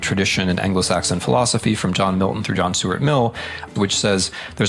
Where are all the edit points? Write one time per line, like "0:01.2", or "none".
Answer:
0:03.7